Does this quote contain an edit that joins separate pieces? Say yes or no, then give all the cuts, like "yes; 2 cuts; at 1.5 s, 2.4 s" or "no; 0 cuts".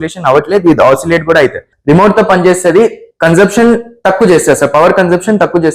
yes; 1 cut; at 1.7 s